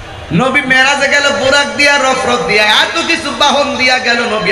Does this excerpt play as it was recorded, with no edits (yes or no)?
yes